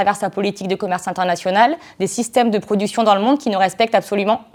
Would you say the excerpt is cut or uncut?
uncut